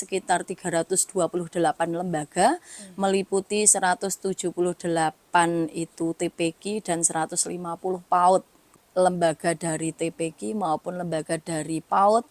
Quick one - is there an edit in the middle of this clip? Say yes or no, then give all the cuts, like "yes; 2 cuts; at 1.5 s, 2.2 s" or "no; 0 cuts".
yes; 1 cut; at 8.8 s